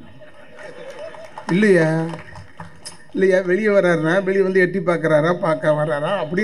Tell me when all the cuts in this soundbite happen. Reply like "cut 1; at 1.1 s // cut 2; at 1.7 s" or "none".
none